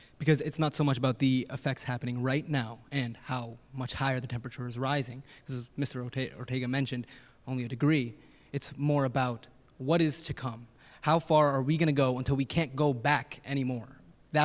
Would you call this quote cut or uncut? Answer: uncut